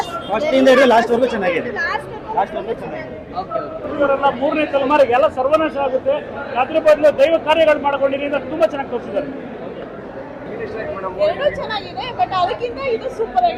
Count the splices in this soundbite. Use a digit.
0